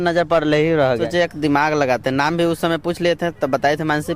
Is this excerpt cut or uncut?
cut